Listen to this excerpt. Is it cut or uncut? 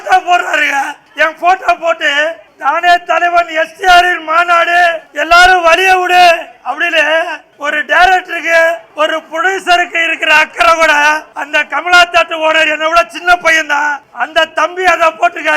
cut